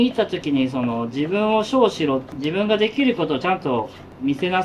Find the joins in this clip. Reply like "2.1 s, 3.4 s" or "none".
2.3 s